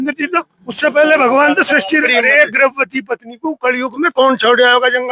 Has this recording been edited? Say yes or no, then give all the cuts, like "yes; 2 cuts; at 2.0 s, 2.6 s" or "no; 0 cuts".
yes; 1 cut; at 2.0 s